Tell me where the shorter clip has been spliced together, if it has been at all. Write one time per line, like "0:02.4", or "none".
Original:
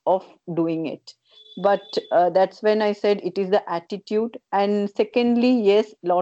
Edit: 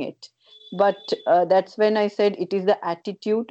none